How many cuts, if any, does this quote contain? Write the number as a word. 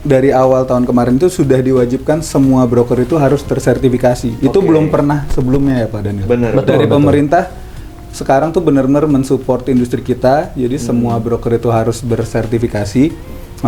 zero